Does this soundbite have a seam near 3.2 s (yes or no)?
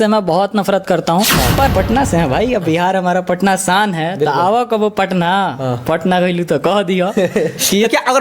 no